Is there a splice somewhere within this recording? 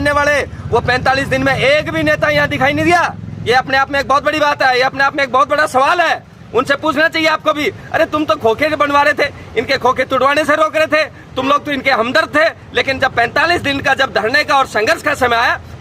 no; 0 cuts

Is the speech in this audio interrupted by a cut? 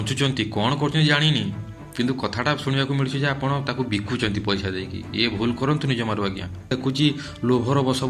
yes; 1 cut; at 6.7 s

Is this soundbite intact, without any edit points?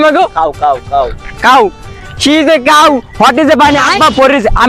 yes; 0 cuts

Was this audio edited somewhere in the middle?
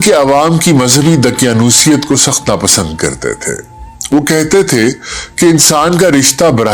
no; 0 cuts

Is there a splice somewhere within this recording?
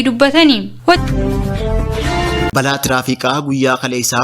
yes; 2 cuts; at 1.0 s, 2.5 s

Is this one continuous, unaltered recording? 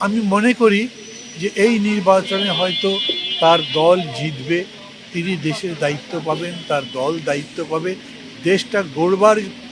yes; 0 cuts

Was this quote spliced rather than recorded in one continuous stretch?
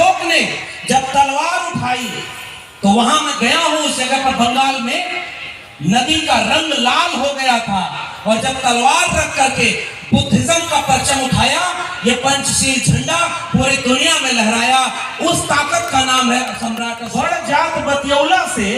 yes; 1 cut; at 16.9 s

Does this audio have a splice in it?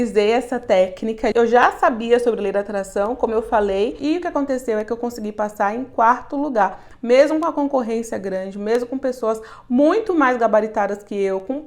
yes; 2 cuts; at 1.3 s, 4.0 s

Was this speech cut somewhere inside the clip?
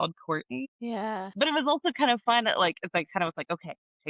yes; 1 cut; at 1.2 s

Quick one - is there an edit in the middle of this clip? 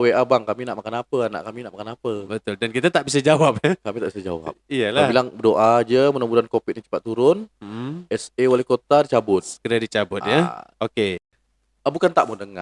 yes; 1 cut; at 11.2 s

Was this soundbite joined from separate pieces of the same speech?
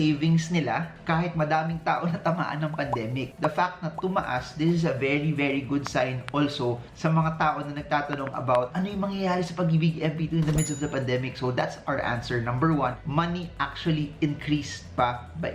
no; 0 cuts

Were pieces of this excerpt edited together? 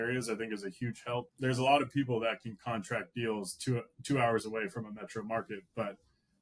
yes; 1 cut; at 1.3 s

